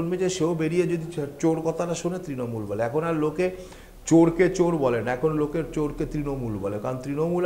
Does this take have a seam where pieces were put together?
no; 0 cuts

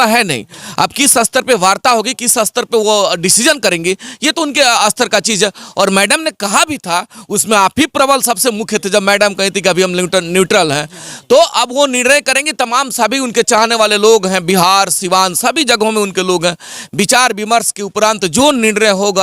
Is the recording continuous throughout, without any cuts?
yes; 0 cuts

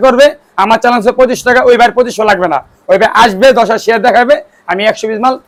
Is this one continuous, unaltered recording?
yes; 0 cuts

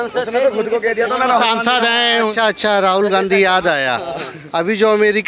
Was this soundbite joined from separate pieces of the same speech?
no; 0 cuts

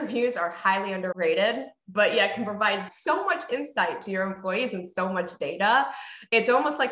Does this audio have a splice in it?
yes; 2 cuts; at 1.1 s, 2.9 s

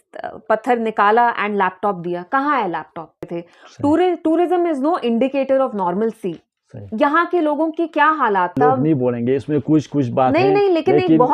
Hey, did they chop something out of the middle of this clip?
yes; 2 cuts; at 3.3 s, 8.6 s

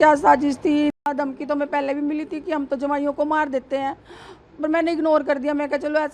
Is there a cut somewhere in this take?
yes; 1 cut; at 0.9 s

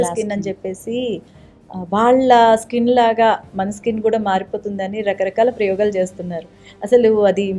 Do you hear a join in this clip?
no; 0 cuts

